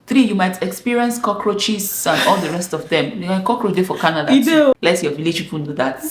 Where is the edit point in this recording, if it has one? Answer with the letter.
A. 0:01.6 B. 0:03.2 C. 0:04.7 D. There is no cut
C